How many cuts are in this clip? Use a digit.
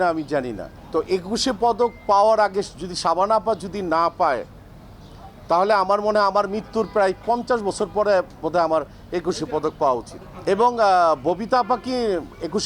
0